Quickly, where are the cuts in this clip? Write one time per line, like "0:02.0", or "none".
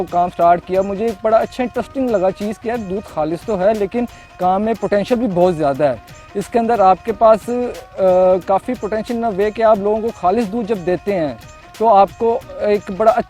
none

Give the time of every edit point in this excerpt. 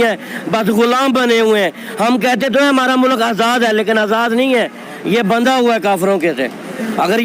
none

